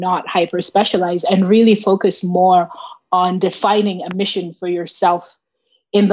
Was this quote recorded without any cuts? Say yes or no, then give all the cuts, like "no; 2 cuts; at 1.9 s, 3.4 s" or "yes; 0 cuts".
yes; 0 cuts